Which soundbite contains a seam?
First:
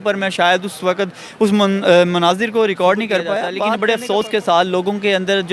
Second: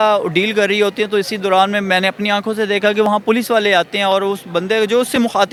first; 1 cut; at 3.6 s

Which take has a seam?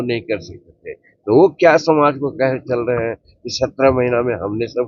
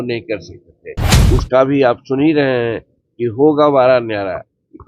second; 1 cut; at 1.1 s

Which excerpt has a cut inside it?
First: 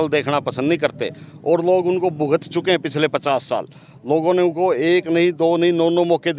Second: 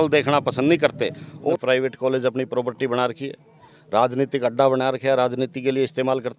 second; 1 cut; at 1.5 s

